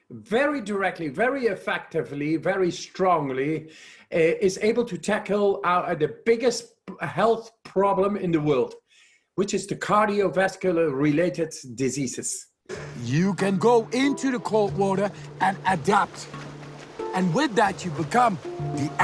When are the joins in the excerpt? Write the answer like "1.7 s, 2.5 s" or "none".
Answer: none